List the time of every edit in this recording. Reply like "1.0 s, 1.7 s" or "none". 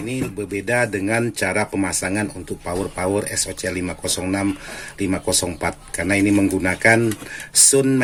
none